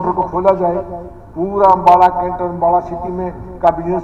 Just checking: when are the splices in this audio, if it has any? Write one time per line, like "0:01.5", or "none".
none